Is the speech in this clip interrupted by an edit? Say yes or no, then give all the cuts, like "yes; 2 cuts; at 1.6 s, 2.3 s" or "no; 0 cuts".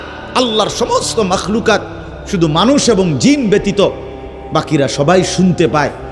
no; 0 cuts